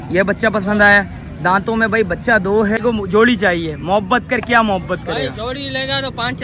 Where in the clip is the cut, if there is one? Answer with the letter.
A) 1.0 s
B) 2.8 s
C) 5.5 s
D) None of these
B